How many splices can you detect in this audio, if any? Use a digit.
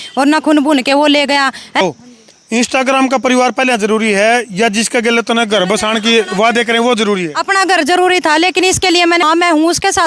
2